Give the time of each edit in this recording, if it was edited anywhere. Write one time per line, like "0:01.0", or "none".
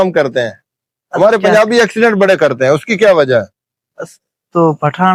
none